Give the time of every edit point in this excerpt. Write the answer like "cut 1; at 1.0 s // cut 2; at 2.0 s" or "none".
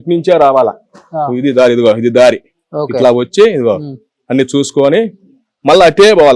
none